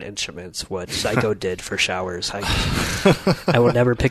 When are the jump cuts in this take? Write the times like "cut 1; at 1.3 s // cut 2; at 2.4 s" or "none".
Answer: none